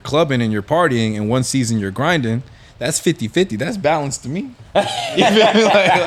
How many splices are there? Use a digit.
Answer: 0